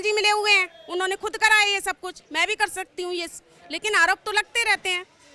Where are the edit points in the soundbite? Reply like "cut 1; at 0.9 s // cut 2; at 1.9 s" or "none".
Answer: none